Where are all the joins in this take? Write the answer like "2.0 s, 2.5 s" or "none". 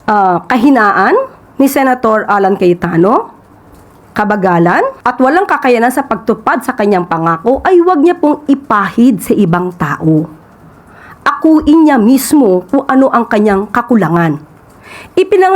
1.4 s, 5.0 s